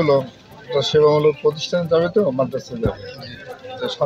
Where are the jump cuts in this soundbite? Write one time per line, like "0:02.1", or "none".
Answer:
none